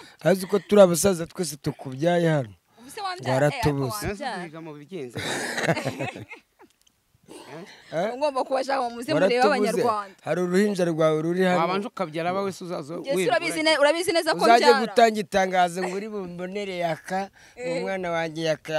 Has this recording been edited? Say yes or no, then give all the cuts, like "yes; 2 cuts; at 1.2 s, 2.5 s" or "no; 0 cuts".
no; 0 cuts